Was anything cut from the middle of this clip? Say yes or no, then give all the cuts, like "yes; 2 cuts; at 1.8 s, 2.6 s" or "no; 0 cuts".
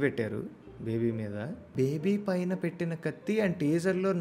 yes; 1 cut; at 1.7 s